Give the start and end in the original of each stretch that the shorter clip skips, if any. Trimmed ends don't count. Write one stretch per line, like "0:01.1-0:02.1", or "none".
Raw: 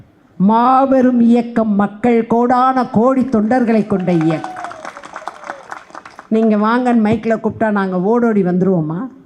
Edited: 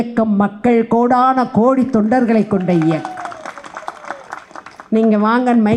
none